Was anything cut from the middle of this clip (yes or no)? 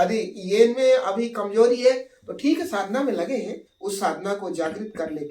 yes